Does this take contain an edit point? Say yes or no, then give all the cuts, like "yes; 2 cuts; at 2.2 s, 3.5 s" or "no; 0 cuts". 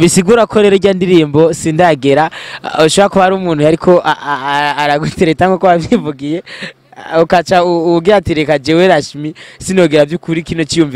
no; 0 cuts